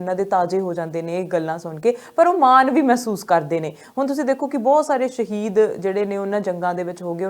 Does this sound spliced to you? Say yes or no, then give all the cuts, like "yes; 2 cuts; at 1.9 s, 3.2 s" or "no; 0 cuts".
no; 0 cuts